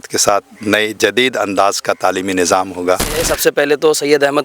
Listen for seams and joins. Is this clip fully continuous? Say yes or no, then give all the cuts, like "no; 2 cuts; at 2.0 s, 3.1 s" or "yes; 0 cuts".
no; 1 cut; at 3.3 s